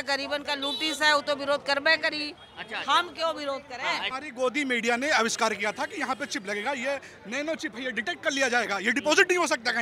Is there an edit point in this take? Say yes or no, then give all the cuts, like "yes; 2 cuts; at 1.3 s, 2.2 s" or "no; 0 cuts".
yes; 1 cut; at 4.2 s